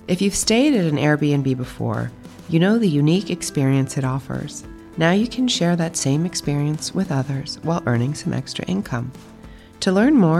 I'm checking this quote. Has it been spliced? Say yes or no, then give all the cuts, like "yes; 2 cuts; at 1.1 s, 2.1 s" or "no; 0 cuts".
no; 0 cuts